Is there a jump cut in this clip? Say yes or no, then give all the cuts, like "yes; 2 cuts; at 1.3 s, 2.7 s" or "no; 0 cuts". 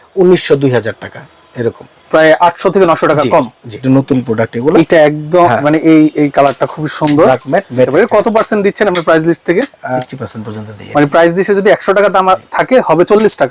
yes; 3 cuts; at 3.7 s, 7.9 s, 10.0 s